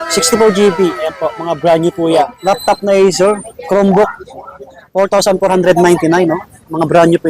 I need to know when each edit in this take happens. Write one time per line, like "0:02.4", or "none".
0:02.4